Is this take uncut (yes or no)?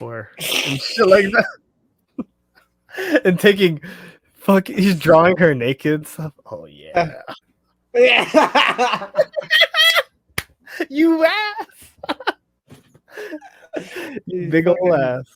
yes